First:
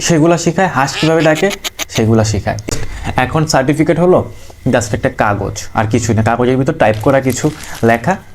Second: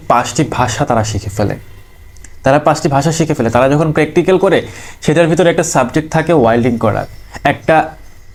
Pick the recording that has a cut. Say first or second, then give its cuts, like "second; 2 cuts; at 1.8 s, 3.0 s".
first; 1 cut; at 2.7 s